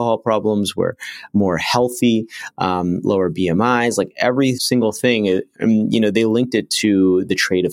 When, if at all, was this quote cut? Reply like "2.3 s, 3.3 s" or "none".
4.6 s